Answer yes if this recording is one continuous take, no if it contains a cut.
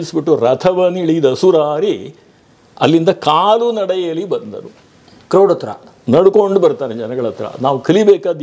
yes